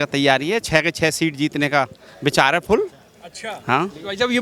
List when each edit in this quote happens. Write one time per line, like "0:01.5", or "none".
none